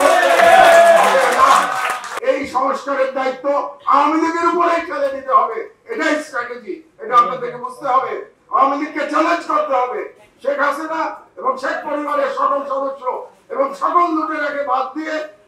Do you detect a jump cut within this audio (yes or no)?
yes